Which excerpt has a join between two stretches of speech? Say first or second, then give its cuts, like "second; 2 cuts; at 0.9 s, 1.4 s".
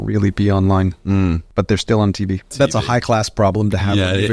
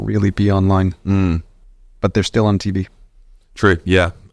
first; 2 cuts; at 1.4 s, 2.5 s